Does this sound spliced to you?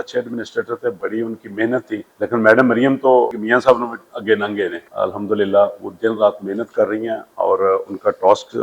yes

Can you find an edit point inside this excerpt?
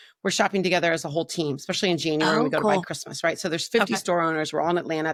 no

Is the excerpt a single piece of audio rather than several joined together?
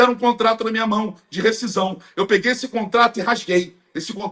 yes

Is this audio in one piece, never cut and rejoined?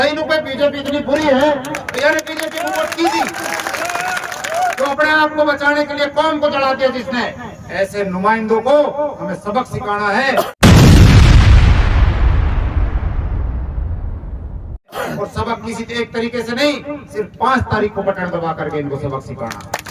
no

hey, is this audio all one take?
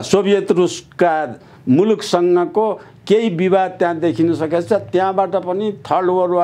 yes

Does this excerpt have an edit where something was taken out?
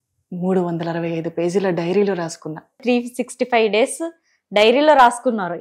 yes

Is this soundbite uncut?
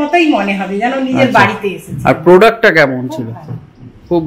yes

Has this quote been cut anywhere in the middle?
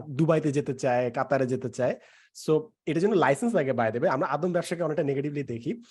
no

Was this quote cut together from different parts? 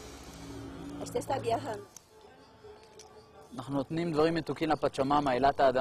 yes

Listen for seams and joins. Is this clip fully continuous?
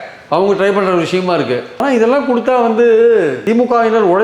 yes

